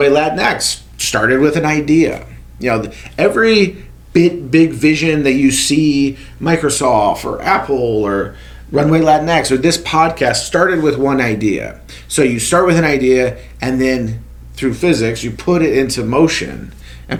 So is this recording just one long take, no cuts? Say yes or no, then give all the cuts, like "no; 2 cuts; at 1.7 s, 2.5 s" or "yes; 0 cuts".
yes; 0 cuts